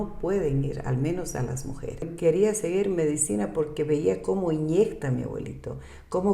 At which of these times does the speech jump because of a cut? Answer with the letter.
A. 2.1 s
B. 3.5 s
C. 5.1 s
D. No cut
A